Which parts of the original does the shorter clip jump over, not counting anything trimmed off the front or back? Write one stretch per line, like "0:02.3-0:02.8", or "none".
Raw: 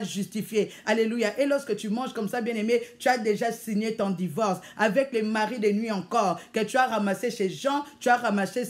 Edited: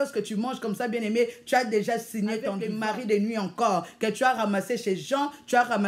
0:04.2-0:05.2